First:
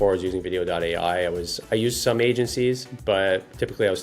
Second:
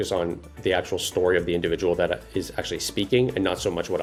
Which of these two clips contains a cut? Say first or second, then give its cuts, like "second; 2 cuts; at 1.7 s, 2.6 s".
first; 1 cut; at 1.6 s